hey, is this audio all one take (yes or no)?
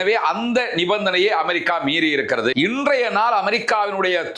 no